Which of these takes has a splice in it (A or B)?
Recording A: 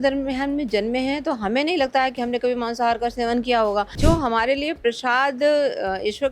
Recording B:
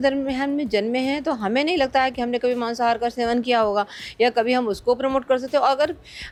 A